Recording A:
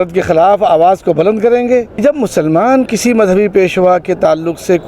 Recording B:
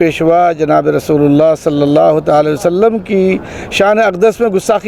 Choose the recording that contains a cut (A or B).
A